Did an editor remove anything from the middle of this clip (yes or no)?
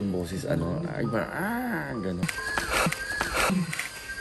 no